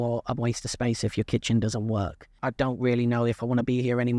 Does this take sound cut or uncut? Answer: cut